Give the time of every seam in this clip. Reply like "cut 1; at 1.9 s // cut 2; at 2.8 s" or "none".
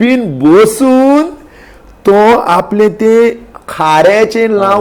none